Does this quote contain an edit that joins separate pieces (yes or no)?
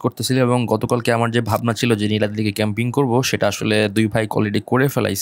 no